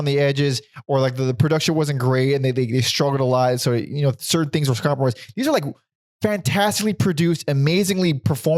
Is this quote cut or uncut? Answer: uncut